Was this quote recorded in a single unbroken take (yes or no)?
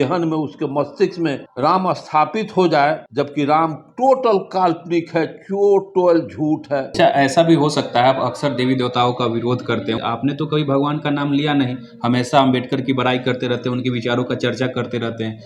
no